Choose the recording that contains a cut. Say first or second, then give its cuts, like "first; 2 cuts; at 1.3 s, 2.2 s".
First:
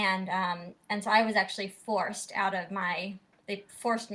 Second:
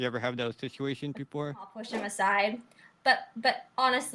second; 1 cut; at 1.8 s